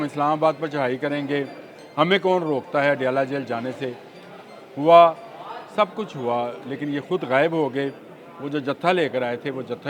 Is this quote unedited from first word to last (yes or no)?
yes